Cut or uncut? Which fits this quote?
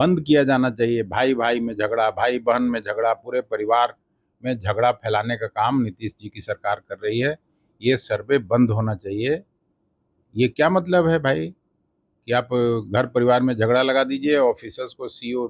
uncut